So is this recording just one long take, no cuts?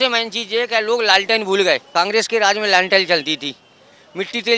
no; 1 cut; at 1.8 s

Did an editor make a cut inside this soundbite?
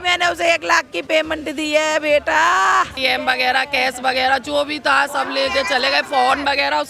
yes; 1 cut; at 2.9 s

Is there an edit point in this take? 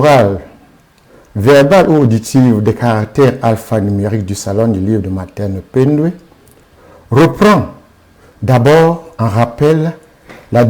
yes; 1 cut; at 9.1 s

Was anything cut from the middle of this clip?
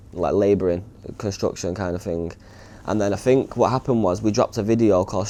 no; 0 cuts

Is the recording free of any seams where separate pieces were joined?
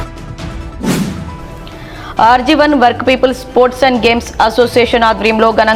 yes; 0 cuts

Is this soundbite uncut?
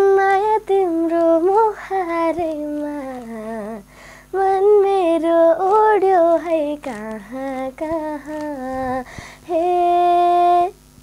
yes; 0 cuts

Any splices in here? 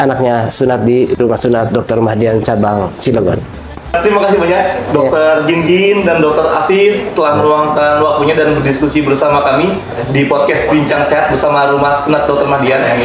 no; 0 cuts

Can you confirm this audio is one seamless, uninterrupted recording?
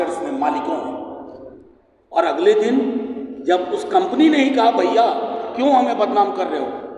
yes; 0 cuts

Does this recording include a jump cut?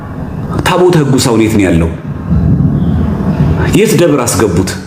no; 0 cuts

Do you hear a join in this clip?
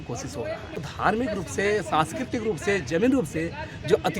yes; 1 cut; at 0.9 s

